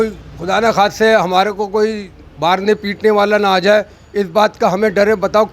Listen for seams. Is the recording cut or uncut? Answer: uncut